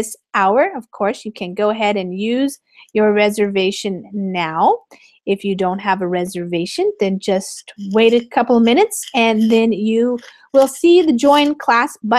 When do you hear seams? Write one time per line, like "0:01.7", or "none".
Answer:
0:05.8